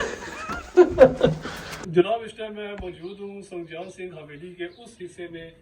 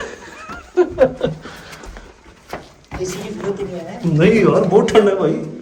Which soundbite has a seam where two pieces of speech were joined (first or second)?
first